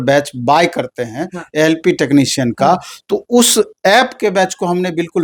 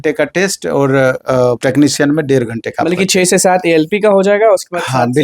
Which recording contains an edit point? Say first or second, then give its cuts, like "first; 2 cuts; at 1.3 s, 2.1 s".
second; 1 cut; at 1.6 s